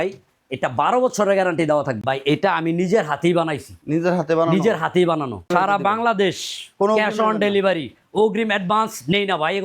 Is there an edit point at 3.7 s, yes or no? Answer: no